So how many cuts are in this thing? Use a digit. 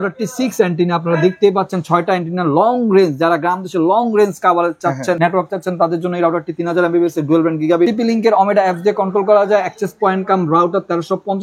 2